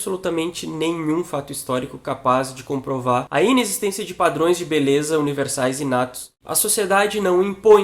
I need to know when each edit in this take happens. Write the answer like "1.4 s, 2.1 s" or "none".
3.3 s, 6.4 s